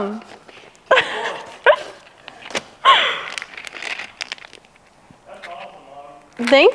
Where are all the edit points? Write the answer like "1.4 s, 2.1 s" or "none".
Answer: none